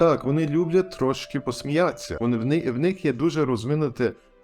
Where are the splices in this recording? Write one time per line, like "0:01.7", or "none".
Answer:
0:01.4
0:02.1